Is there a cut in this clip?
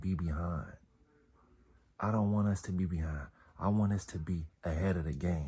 no; 0 cuts

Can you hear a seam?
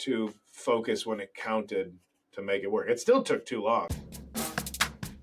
yes; 1 cut; at 3.9 s

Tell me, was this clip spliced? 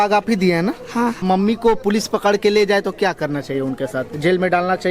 yes; 1 cut; at 1.2 s

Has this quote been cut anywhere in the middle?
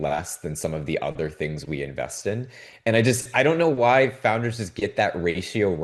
no; 0 cuts

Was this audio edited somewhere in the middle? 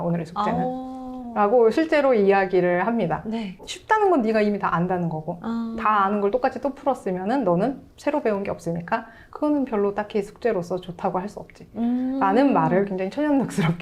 no; 0 cuts

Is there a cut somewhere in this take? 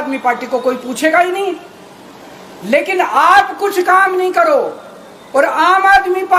no; 0 cuts

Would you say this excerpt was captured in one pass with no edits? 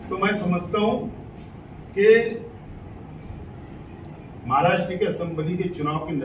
yes; 0 cuts

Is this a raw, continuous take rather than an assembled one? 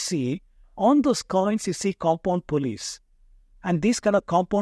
yes; 0 cuts

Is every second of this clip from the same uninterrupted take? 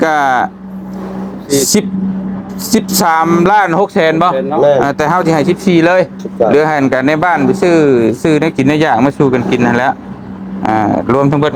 yes; 0 cuts

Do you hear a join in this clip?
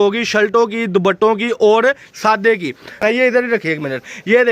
yes; 1 cut; at 3.0 s

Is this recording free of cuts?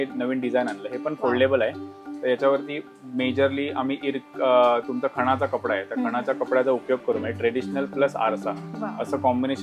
yes; 0 cuts

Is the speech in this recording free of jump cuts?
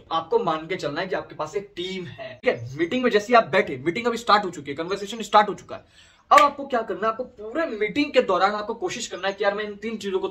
no; 1 cut; at 2.2 s

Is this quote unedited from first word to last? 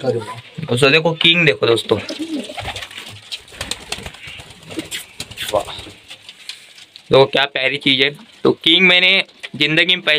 yes; 0 cuts

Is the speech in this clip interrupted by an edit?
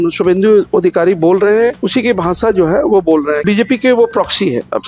yes; 2 cuts; at 1.8 s, 3.4 s

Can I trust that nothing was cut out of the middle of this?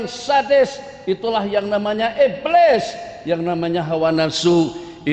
yes; 0 cuts

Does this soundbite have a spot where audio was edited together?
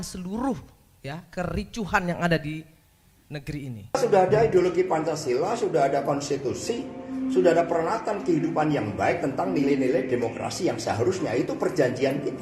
yes; 1 cut; at 3.9 s

